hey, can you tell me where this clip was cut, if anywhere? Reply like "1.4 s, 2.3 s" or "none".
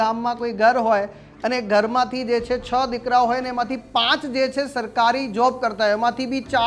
none